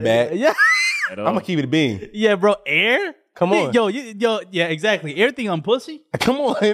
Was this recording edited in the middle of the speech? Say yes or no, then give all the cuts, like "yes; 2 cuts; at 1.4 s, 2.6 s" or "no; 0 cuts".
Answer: no; 0 cuts